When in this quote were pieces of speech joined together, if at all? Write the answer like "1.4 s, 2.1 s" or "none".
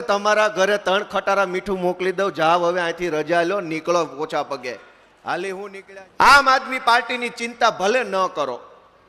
5.8 s

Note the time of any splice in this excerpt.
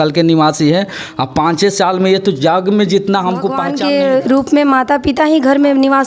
3.5 s

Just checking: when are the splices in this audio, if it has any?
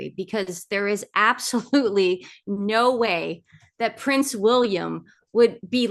none

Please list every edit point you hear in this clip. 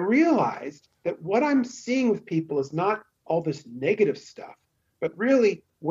none

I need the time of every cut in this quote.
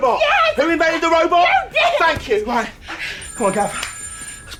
none

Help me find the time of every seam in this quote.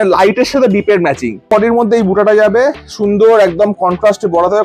1.5 s

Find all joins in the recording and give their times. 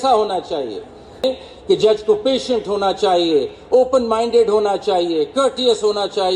1.2 s

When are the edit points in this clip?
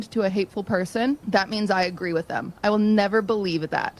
1.2 s

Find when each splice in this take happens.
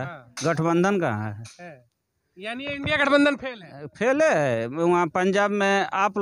none

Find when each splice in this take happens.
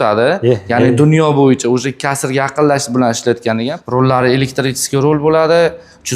3.8 s

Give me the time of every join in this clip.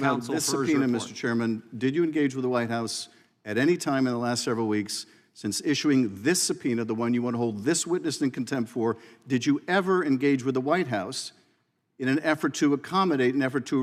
none

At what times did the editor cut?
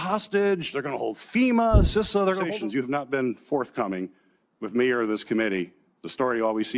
2.5 s

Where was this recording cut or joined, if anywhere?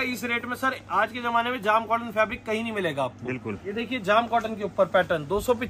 3.6 s

